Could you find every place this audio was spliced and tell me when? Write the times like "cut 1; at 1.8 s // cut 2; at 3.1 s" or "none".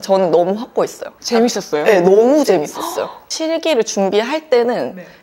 none